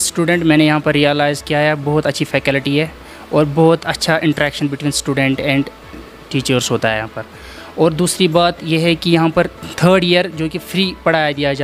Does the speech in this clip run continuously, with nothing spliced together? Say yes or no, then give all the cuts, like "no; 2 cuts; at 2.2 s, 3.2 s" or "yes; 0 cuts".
yes; 0 cuts